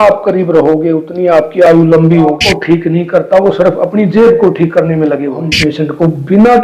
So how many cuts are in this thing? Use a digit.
2